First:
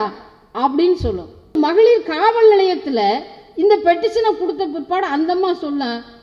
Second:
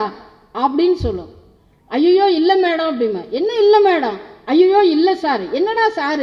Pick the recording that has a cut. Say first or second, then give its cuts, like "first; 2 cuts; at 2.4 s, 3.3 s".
first; 1 cut; at 1.5 s